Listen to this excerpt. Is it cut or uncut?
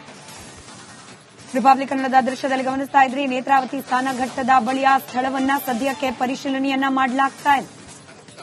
cut